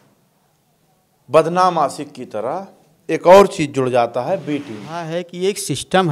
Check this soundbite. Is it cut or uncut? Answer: cut